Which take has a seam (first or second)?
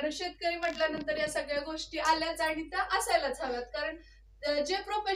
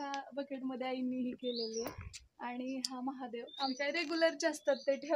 second